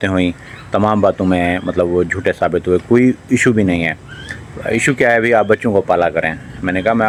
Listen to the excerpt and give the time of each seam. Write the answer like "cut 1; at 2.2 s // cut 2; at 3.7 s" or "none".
none